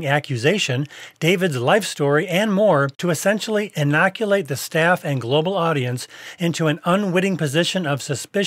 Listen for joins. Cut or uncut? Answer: cut